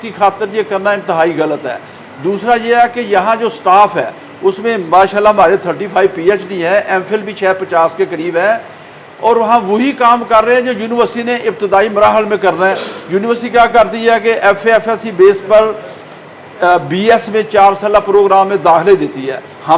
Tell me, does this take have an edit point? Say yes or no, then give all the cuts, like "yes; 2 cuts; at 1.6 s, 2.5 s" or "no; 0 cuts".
no; 0 cuts